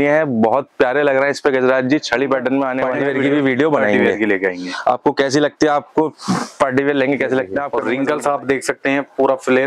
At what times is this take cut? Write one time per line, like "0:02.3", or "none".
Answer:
0:02.9
0:07.7